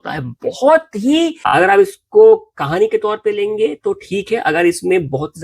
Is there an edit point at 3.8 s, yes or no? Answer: no